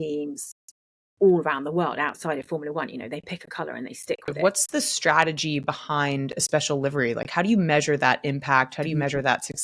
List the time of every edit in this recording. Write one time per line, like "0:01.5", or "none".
0:04.3